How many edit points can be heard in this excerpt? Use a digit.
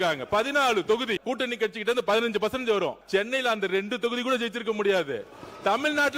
2